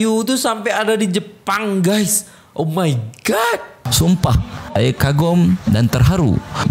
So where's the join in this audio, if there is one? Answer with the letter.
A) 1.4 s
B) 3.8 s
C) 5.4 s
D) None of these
B